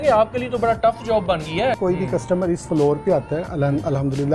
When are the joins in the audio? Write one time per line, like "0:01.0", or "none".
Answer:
0:01.8